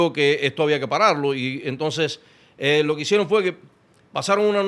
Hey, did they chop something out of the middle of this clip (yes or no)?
no